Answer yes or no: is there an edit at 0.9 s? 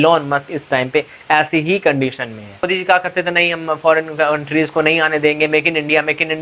no